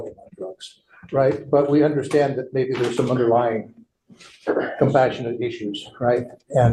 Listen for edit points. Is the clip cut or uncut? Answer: uncut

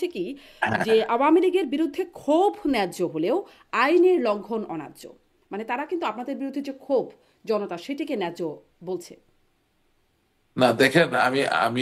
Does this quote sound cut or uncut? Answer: uncut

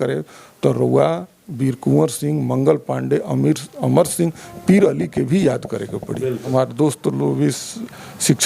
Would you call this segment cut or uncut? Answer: cut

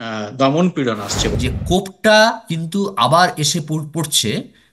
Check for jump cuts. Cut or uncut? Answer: cut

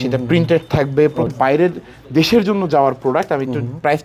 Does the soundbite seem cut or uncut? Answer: cut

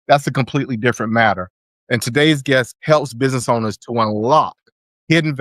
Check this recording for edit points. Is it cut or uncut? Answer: cut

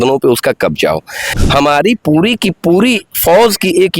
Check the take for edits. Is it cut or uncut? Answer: cut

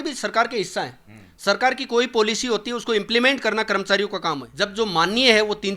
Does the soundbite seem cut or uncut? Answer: cut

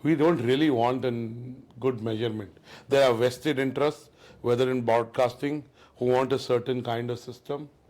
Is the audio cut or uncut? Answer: uncut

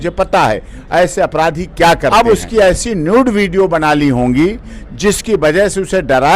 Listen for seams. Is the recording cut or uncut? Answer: cut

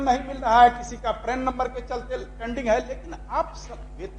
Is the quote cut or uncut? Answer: uncut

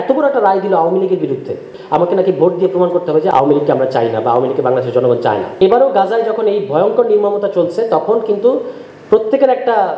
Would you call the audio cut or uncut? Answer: cut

